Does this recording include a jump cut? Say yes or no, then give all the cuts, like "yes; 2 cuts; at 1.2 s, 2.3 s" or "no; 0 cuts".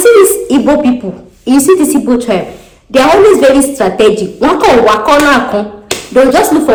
no; 0 cuts